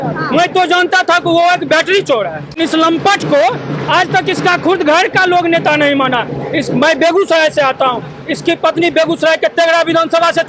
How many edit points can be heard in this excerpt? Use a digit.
1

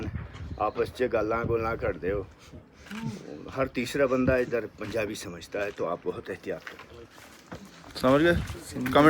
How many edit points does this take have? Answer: 0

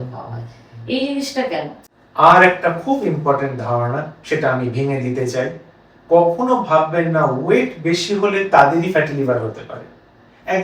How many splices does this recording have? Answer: 1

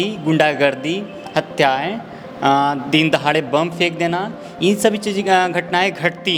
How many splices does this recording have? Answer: 0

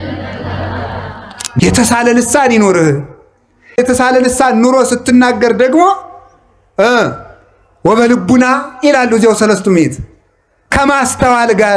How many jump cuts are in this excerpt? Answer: 1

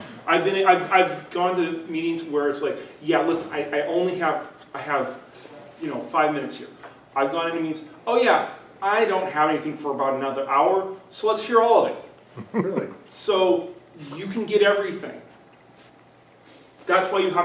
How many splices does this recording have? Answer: 1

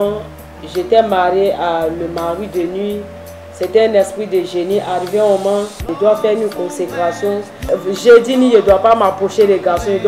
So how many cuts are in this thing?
2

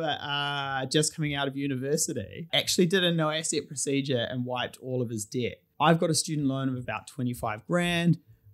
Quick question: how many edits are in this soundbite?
2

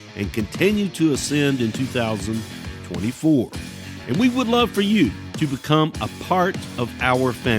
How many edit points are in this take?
2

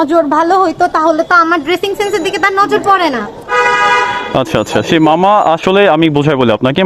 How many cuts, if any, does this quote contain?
0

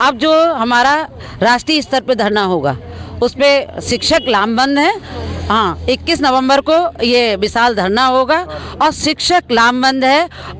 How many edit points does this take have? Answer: 0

